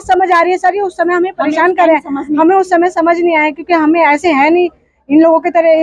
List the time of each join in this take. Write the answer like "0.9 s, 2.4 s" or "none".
none